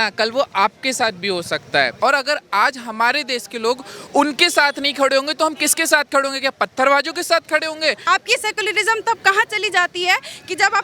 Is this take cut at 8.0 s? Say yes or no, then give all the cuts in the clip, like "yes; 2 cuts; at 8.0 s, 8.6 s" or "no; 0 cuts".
yes; 2 cuts; at 2.0 s, 8.0 s